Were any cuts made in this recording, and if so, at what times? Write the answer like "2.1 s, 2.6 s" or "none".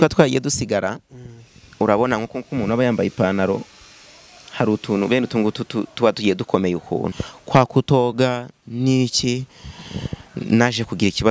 7.1 s